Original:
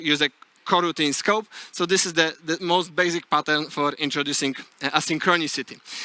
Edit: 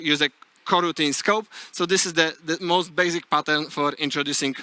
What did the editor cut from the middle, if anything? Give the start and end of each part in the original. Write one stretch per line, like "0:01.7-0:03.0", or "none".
none

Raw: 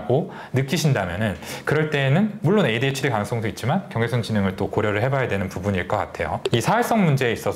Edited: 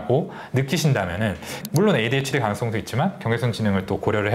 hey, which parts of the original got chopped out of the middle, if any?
0:01.6-0:02.3

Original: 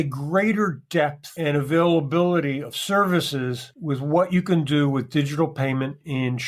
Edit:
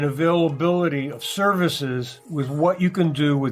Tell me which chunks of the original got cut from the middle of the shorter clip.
none

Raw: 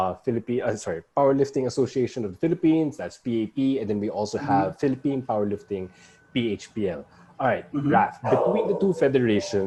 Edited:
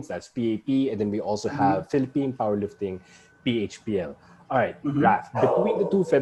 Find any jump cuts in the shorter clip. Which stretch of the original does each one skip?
none

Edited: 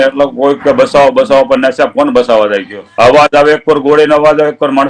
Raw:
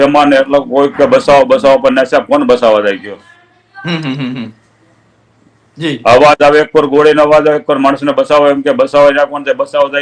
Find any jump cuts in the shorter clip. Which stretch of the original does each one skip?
0:03.1-0:05.9

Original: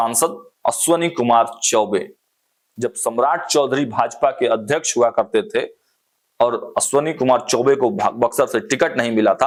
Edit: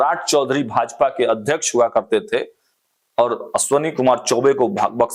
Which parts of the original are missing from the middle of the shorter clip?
none

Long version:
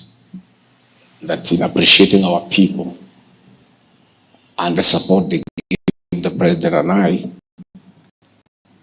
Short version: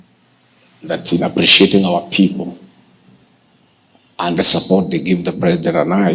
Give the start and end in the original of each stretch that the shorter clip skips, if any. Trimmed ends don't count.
0:05.5-0:06.1

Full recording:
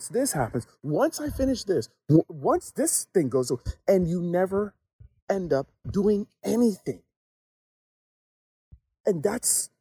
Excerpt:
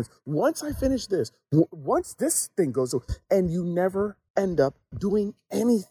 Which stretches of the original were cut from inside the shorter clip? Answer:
0:04.8-0:05.1

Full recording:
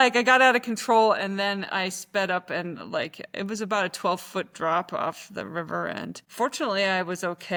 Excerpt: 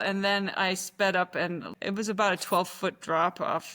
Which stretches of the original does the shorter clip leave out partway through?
0:02.8-0:03.2

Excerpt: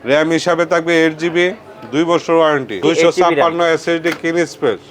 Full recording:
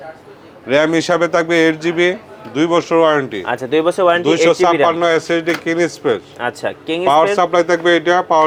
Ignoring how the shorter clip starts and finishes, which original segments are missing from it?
0:03.4-0:04.2

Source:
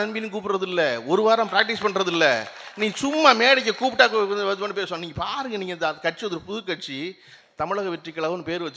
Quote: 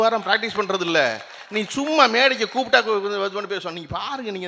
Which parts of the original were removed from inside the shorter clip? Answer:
none

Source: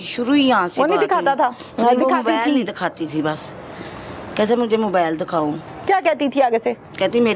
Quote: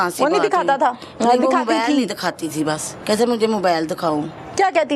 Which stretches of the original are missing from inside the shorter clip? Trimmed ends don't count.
0:03.5-0:04.2

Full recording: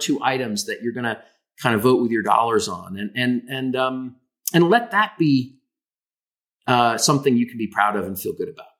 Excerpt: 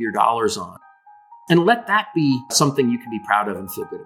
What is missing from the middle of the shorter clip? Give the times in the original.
0:03.1-0:04.0
0:05.6-0:07.0

